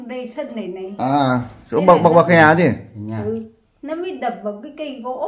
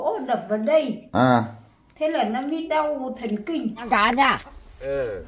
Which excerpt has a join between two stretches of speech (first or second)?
second